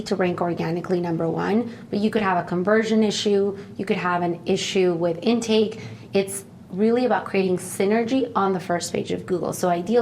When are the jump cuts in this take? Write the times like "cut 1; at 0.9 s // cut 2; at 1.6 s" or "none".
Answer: cut 1; at 5.9 s